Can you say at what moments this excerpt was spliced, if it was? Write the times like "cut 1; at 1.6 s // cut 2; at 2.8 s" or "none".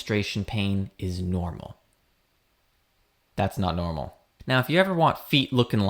cut 1; at 4.2 s